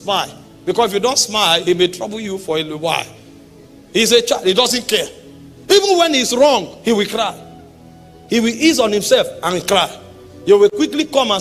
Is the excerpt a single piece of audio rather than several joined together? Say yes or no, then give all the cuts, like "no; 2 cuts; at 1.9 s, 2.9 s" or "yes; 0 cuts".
yes; 0 cuts